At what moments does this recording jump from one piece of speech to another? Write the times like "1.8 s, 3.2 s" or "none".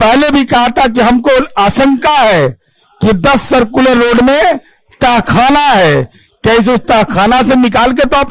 none